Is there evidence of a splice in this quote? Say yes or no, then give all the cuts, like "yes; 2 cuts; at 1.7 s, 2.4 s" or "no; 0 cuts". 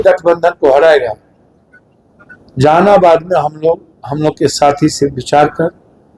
no; 0 cuts